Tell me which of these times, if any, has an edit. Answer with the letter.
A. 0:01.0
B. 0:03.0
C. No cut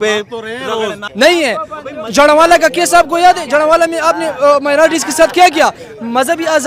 A